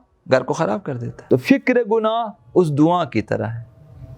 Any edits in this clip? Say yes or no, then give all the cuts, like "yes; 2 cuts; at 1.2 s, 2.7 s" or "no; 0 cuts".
yes; 1 cut; at 1.1 s